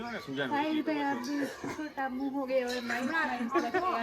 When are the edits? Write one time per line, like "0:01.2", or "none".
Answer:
none